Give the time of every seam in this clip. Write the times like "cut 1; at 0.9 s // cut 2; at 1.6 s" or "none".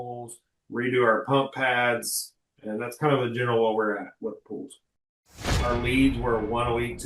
cut 1; at 5.3 s